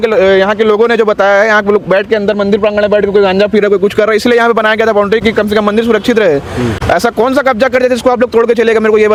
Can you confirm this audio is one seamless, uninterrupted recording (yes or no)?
yes